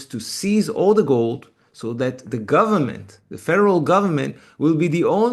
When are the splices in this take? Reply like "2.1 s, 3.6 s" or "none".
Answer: none